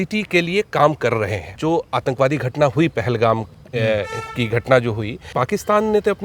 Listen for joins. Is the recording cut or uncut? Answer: cut